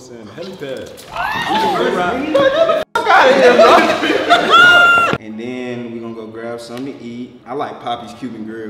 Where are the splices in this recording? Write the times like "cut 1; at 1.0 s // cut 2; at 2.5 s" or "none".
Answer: cut 1; at 5.2 s // cut 2; at 7.4 s